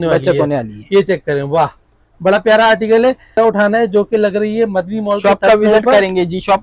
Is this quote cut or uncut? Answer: cut